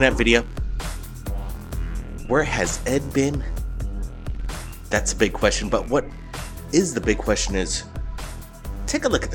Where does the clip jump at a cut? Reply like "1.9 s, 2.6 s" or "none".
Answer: none